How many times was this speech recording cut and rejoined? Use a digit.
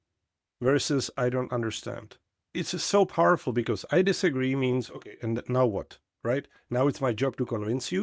1